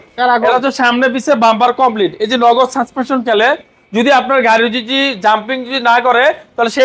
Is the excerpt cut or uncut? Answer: uncut